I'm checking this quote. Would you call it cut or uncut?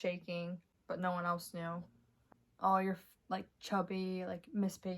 cut